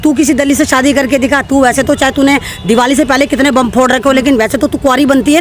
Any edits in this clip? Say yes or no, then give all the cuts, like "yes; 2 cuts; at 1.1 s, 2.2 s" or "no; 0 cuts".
no; 0 cuts